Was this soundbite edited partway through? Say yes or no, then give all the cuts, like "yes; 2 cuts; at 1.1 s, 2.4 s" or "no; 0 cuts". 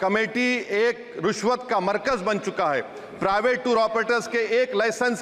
no; 0 cuts